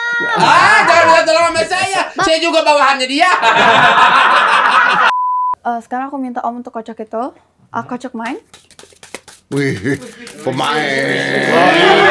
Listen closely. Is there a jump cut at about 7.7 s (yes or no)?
no